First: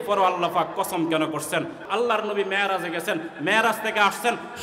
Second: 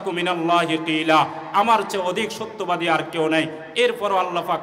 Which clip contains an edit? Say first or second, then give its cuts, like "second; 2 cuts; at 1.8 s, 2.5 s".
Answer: first; 1 cut; at 1.8 s